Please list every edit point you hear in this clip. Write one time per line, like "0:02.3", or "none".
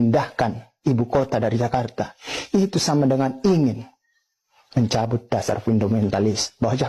none

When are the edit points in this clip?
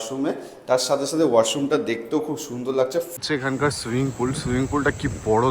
0:03.1

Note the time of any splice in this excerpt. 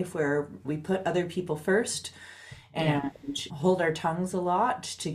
none

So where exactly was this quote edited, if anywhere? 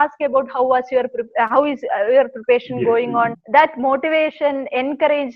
0:03.4

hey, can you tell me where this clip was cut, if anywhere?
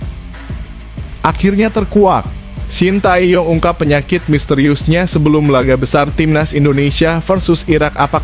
0:01.2

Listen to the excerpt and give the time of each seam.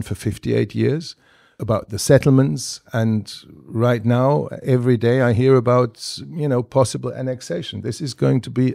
0:01.6

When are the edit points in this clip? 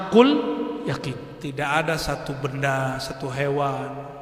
0:01.3

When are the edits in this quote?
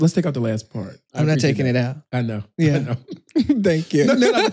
0:01.0

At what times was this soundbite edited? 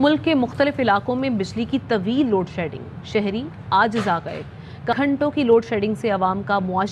0:05.0

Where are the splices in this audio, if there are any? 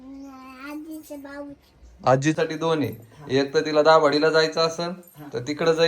0:02.3

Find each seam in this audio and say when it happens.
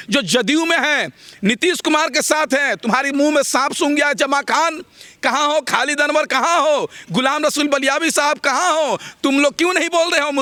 none

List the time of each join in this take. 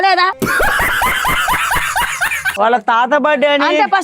0:02.6

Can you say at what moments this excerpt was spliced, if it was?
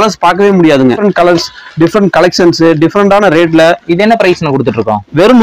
0:01.0

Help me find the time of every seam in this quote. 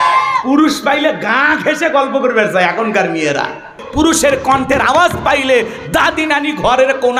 0:03.8

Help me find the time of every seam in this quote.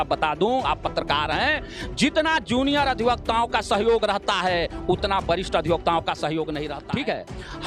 0:06.7

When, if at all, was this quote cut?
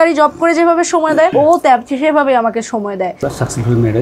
0:01.3
0:03.2

